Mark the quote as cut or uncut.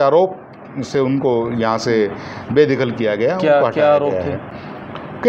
uncut